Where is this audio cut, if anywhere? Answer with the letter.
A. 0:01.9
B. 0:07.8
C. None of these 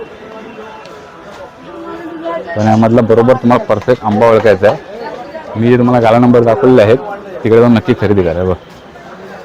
C